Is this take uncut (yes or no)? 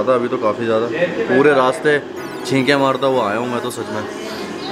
yes